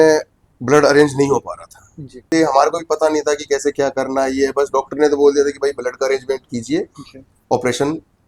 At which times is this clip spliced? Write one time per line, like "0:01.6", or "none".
0:02.3

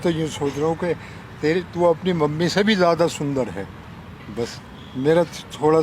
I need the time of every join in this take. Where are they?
none

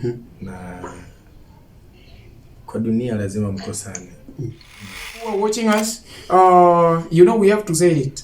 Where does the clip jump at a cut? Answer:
0:05.2

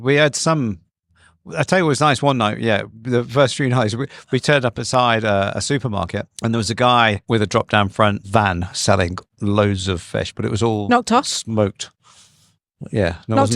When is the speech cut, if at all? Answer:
0:06.3
0:07.2
0:08.2

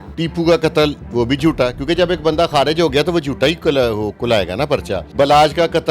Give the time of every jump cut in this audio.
0:05.0

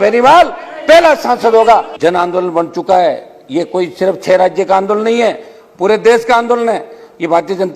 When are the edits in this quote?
0:01.9

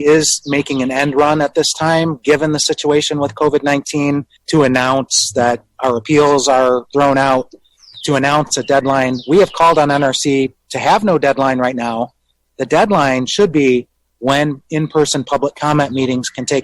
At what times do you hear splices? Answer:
0:04.3
0:06.9

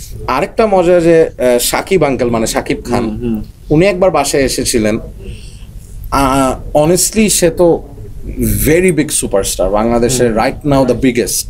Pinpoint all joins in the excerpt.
none

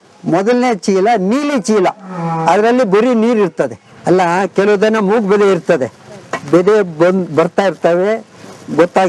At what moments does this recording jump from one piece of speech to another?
0:03.9

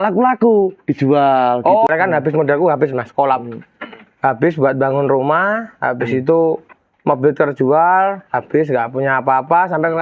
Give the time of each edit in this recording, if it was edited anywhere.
0:01.9

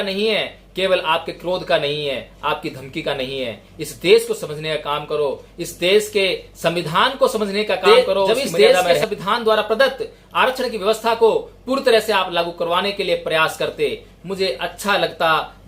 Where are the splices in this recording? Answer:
0:07.8

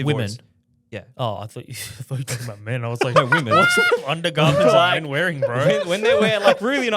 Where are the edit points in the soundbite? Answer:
none

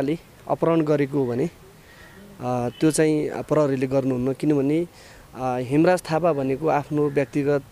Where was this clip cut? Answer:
none

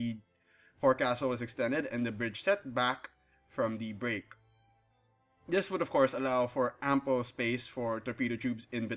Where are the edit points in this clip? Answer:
0:01.2

